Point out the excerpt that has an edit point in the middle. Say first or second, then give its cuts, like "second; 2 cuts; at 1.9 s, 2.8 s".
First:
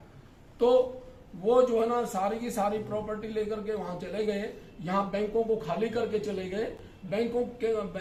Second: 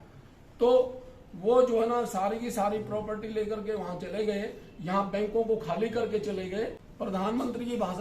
second; 1 cut; at 6.8 s